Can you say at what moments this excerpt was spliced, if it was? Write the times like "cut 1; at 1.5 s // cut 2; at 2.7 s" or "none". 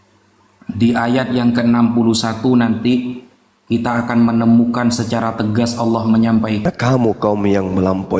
cut 1; at 6.6 s